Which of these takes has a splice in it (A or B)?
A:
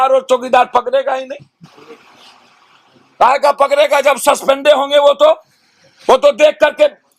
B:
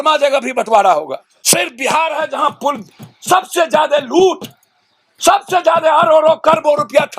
B